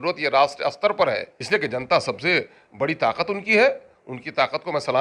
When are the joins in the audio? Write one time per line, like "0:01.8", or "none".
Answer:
0:01.3